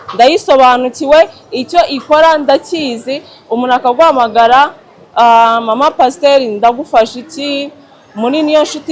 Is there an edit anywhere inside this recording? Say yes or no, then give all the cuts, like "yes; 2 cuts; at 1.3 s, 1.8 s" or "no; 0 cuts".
no; 0 cuts